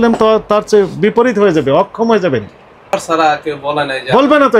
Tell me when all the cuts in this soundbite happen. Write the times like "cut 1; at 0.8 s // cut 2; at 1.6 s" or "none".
cut 1; at 2.9 s